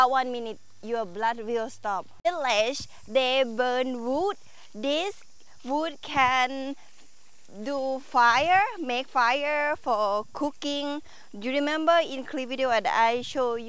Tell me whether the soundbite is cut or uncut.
cut